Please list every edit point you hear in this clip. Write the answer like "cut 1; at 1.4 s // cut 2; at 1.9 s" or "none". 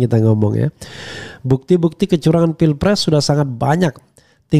none